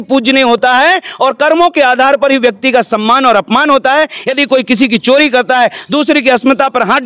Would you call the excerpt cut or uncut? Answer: uncut